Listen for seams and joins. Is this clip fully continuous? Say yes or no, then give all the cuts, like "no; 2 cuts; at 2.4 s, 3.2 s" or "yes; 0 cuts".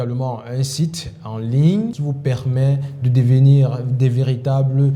no; 1 cut; at 2.0 s